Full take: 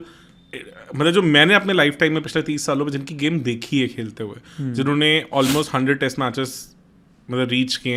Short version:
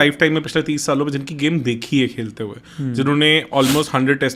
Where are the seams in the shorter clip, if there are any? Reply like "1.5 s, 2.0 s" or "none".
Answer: none